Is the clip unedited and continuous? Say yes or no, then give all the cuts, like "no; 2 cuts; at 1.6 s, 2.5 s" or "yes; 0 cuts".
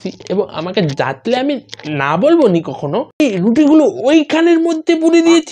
no; 1 cut; at 3.2 s